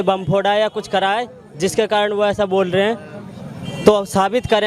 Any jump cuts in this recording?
no; 0 cuts

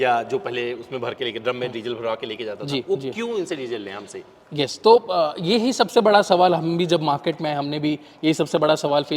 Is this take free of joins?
yes; 0 cuts

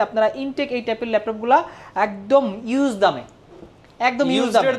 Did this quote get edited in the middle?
no; 0 cuts

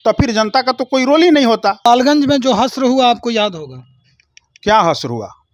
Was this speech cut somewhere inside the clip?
yes; 1 cut; at 1.8 s

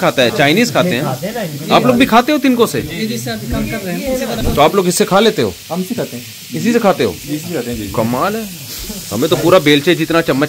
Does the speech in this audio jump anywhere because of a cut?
yes; 1 cut; at 4.4 s

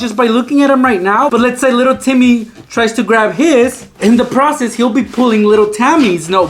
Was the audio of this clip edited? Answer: no; 0 cuts

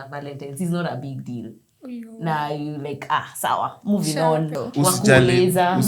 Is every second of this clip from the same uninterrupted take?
no; 1 cut; at 4.6 s

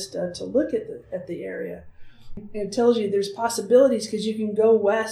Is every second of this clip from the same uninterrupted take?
no; 1 cut; at 2.4 s

